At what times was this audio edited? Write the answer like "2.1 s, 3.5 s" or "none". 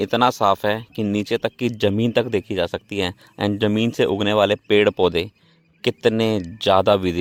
none

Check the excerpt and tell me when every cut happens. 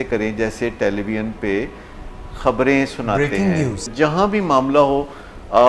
3.9 s

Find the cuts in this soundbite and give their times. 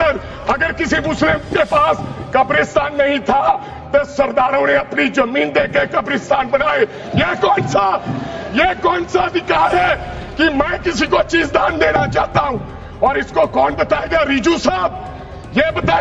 none

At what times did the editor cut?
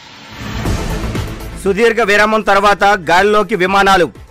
1.1 s

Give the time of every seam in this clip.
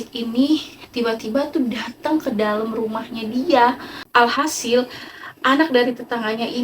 4.1 s

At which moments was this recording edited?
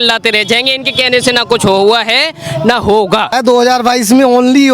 3.3 s

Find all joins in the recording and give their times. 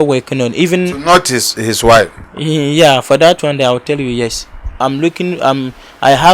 4.8 s

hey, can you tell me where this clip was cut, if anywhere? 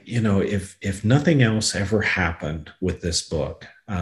none

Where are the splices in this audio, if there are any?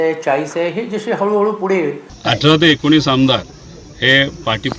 2.1 s

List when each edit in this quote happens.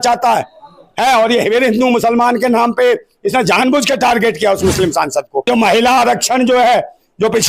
5.5 s

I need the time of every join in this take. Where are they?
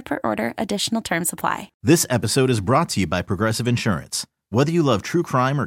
1.7 s

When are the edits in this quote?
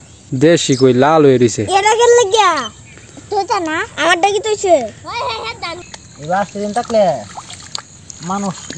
5.9 s

